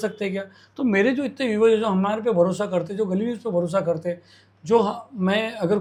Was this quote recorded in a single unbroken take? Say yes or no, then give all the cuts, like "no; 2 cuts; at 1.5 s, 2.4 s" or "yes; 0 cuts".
yes; 0 cuts